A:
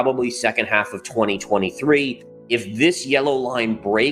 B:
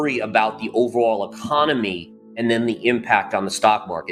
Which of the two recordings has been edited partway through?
A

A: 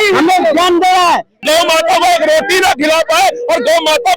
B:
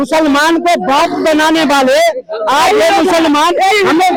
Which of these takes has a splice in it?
A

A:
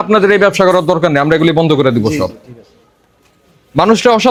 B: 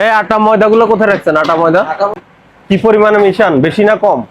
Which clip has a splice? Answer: B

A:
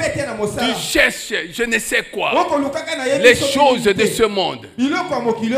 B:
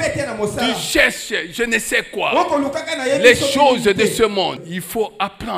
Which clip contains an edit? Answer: B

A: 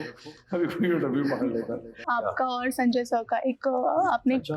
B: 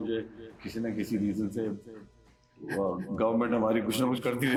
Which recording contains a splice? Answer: A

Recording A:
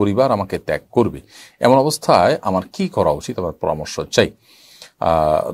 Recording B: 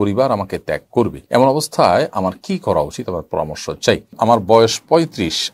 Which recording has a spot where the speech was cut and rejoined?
B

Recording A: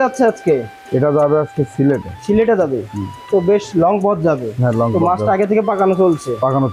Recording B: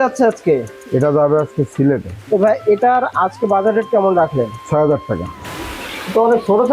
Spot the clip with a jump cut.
B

